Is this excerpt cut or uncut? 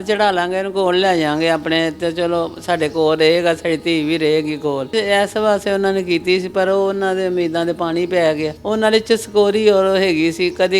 cut